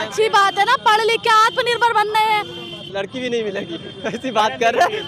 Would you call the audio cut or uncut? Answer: uncut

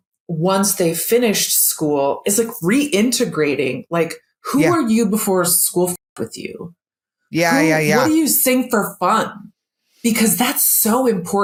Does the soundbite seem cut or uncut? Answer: uncut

